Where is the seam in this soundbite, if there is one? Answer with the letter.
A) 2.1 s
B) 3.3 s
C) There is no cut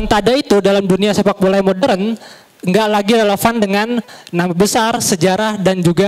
C